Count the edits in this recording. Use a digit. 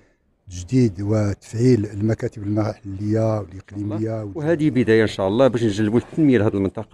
1